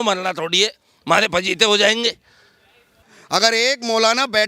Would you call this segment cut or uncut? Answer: cut